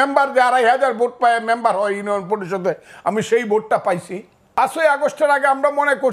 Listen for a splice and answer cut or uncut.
cut